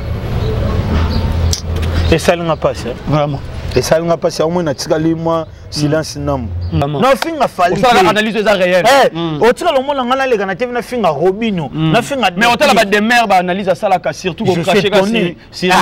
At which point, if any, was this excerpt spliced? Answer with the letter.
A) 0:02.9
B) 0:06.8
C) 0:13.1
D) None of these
B